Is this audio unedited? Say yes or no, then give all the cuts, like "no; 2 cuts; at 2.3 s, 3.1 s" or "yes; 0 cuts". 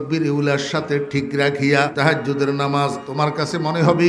no; 2 cuts; at 1.9 s, 3.0 s